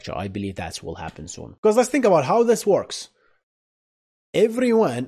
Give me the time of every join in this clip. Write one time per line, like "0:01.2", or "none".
0:01.4